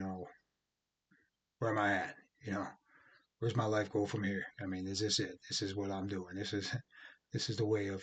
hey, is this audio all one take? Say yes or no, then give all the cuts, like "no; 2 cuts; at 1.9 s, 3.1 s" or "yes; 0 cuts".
yes; 0 cuts